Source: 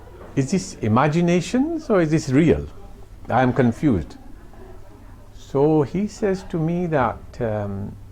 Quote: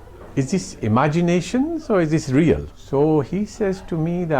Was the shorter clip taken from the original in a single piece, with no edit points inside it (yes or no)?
no